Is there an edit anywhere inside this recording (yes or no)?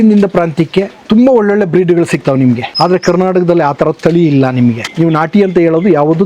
yes